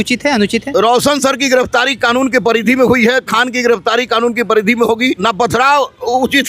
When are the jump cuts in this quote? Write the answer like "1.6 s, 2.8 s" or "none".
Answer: 5.2 s